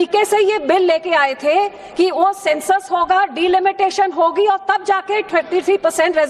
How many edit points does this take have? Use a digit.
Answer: 1